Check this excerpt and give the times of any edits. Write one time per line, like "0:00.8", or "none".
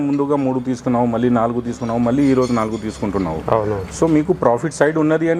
none

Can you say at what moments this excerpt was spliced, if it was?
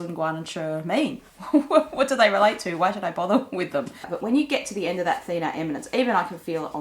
0:04.1

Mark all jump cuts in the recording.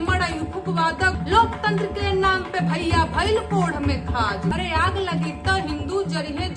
0:01.2
0:04.5

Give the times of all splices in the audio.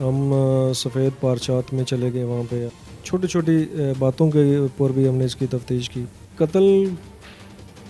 0:02.7
0:06.2

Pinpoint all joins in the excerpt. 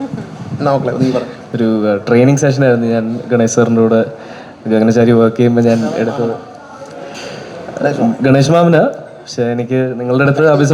0:01.4

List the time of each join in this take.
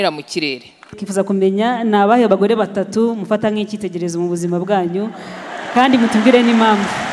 0:00.9

